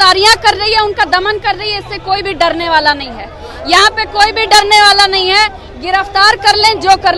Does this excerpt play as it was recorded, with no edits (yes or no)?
yes